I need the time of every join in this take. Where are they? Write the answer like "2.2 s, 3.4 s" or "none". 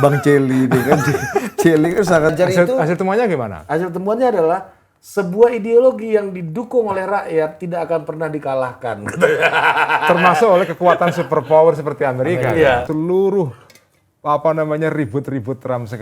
2.3 s, 12.9 s